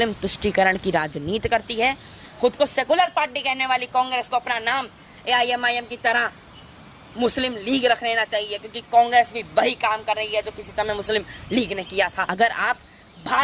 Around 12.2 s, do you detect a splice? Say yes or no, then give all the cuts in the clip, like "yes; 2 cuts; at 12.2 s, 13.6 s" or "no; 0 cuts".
yes; 2 cuts; at 2.2 s, 12.2 s